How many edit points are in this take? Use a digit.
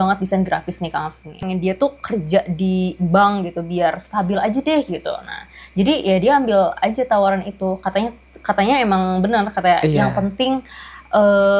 1